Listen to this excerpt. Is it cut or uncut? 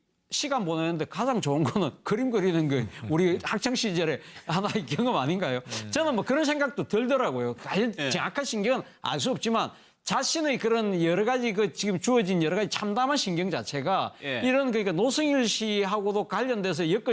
cut